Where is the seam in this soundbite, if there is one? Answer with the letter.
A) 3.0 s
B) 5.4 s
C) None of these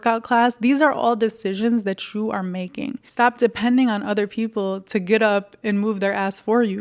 A